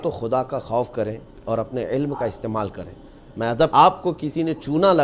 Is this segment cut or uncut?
cut